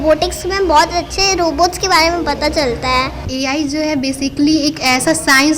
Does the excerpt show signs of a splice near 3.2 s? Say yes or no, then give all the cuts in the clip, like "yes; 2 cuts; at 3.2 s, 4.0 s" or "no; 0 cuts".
yes; 1 cut; at 3.2 s